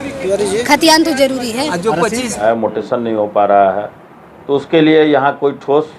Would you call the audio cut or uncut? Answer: cut